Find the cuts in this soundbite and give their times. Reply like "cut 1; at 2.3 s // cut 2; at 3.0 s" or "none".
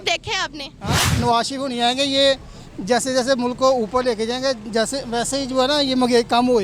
cut 1; at 1.1 s